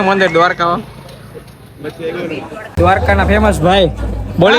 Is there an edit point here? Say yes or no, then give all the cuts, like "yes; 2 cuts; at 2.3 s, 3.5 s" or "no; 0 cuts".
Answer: yes; 1 cut; at 2.7 s